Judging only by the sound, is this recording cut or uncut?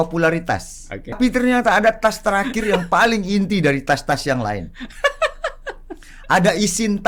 cut